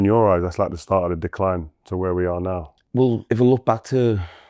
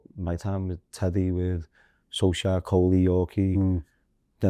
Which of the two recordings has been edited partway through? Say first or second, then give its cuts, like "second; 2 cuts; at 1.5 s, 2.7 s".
first; 1 cut; at 3.2 s